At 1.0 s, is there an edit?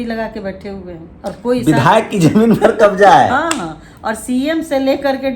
yes; 1 cut; at 1.0 s

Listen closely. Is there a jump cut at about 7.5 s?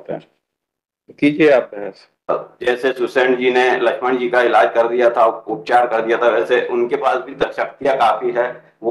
no; 1 cut; at 2.3 s

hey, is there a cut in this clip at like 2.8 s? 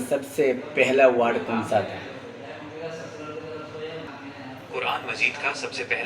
no; 1 cut; at 4.1 s

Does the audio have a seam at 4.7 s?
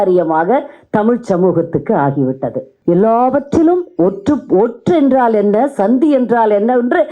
no; 1 cut; at 2.7 s

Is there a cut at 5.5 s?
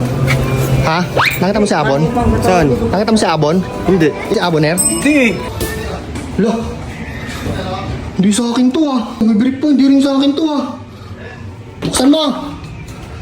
yes; 3 cuts; at 5.5 s, 9.2 s, 11.8 s

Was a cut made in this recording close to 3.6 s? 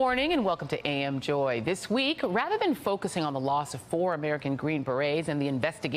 yes; 1 cut; at 3.6 s

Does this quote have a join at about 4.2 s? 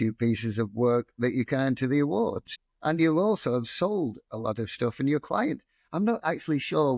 no; 1 cut; at 2.5 s

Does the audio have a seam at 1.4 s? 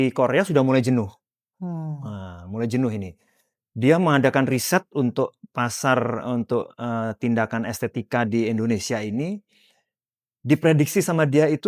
no; 0 cuts

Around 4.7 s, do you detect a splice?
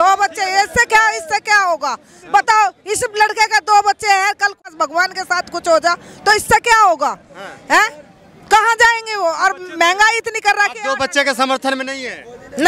yes; 1 cut; at 4.7 s

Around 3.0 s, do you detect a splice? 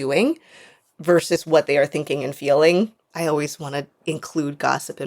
yes; 2 cuts; at 3.0 s, 3.9 s

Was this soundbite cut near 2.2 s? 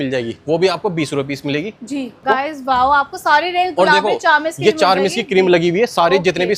yes; 1 cut; at 2.2 s

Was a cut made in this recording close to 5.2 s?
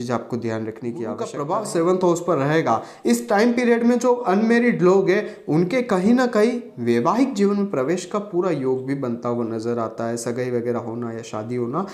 no; 1 cut; at 1.3 s

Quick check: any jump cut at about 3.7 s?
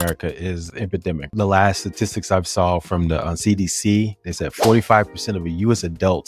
no; 1 cut; at 1.3 s

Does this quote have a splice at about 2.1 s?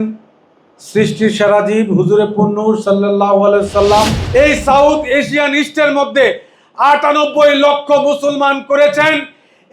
no; 1 cut; at 4.3 s

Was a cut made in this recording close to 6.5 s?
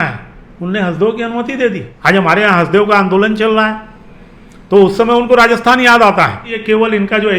yes; 2 cuts; at 1.9 s, 6.5 s

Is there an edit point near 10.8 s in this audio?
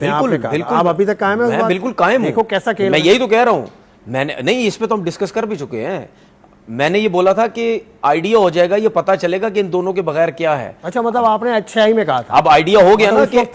no; 0 cuts

